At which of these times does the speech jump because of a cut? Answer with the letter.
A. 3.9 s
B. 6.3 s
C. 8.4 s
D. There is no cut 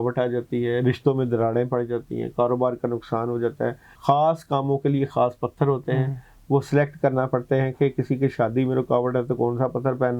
A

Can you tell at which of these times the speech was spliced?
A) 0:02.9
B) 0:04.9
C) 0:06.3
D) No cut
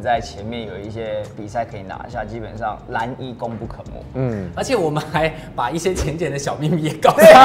D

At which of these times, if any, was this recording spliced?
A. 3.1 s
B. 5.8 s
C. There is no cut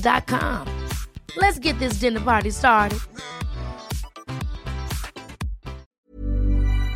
B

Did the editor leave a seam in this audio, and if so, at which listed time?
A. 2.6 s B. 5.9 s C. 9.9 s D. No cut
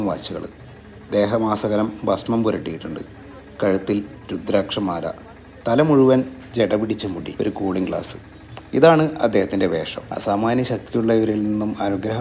D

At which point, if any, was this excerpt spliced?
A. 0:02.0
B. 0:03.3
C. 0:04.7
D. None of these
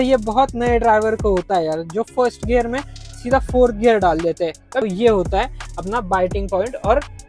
C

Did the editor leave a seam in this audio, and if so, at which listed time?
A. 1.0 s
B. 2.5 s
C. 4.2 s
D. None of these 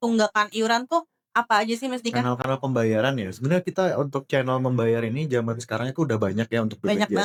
D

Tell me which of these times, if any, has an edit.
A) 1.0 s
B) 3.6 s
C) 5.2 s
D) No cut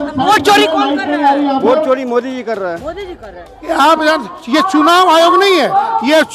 B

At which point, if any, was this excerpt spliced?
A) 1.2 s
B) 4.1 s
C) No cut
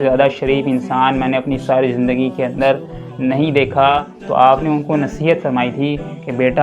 B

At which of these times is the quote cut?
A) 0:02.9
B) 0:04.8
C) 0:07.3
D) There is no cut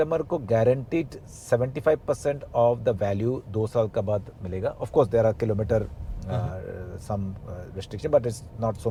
D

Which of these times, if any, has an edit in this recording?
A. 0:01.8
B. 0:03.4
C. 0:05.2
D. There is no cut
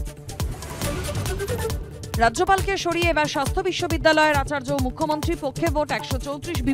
A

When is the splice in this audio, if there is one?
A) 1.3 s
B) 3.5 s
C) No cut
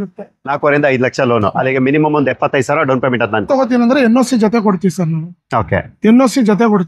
B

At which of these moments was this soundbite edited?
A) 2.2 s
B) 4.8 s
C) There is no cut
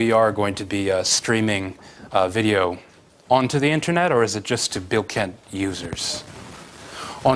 C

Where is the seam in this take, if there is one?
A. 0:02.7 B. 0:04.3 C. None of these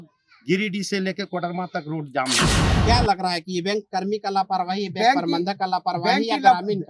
A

